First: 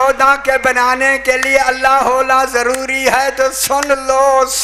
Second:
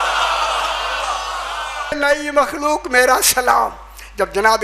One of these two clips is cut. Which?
second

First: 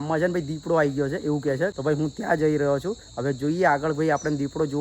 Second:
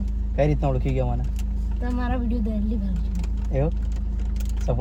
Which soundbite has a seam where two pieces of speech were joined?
first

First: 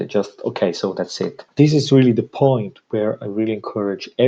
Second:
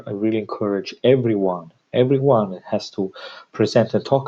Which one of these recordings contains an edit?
first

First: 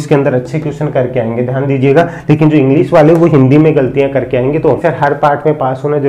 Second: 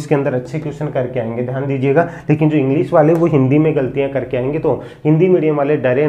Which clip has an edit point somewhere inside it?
first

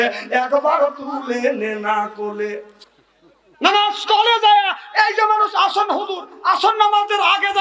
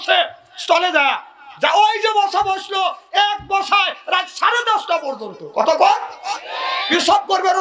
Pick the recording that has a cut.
first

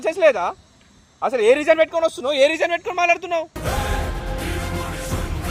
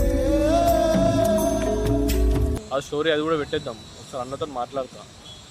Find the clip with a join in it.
second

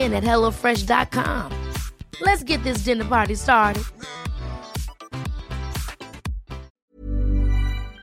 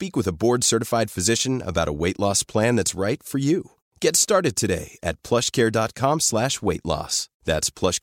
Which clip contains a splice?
first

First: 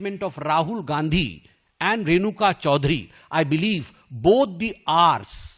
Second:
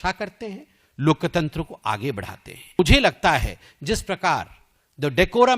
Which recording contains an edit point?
second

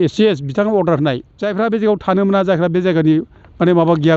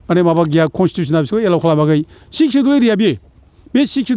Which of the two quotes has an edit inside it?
first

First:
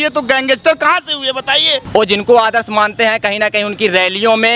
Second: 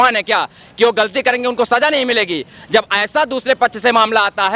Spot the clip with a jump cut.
first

